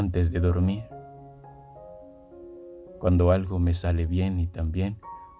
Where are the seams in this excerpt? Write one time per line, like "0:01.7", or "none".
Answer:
none